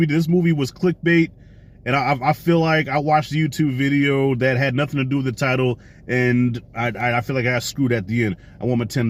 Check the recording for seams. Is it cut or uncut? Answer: uncut